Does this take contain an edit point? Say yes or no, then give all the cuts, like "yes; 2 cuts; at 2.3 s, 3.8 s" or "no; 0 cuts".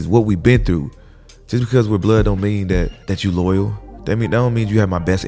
yes; 1 cut; at 3.0 s